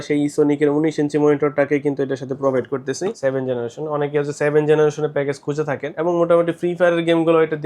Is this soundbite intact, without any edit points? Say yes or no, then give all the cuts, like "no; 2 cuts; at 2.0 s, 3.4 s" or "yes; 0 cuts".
no; 2 cuts; at 3.1 s, 5.9 s